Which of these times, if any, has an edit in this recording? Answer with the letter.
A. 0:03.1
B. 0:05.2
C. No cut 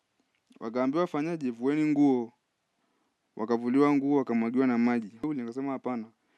B